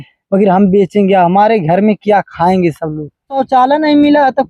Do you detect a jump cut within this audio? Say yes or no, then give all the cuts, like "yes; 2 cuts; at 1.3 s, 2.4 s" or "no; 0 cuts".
yes; 1 cut; at 3.4 s